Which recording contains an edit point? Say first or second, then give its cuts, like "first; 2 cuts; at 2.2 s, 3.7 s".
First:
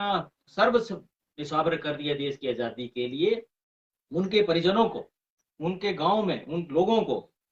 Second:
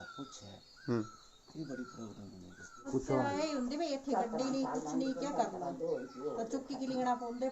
second; 1 cut; at 2.9 s